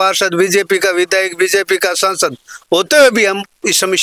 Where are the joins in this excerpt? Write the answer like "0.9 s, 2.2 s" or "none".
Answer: none